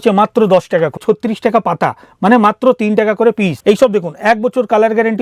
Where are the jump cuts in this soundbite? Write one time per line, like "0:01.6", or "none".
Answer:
0:01.0
0:03.5